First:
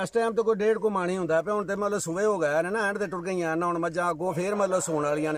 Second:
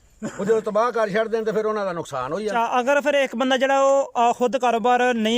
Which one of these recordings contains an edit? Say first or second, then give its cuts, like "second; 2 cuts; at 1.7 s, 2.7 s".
second; 1 cut; at 2.5 s